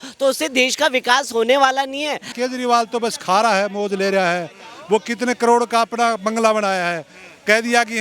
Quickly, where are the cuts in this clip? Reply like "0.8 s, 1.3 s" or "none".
2.3 s